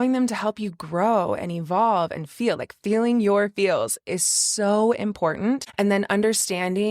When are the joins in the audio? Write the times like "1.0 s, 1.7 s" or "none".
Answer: 5.7 s